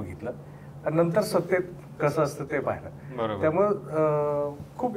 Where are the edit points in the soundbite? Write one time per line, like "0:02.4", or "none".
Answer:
none